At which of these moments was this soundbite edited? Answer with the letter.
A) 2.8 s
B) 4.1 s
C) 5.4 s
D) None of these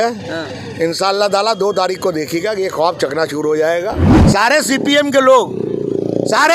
B